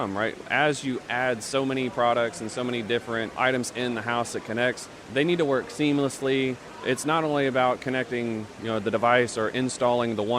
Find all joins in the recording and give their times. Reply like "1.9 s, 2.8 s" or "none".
3.3 s, 4.9 s, 6.7 s